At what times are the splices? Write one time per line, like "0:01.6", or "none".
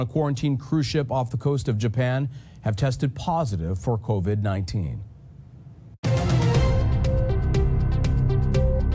0:05.7